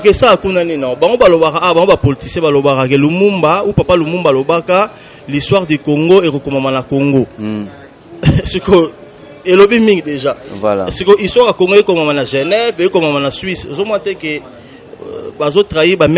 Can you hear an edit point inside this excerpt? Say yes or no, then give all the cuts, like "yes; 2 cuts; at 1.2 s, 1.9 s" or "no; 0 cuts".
no; 0 cuts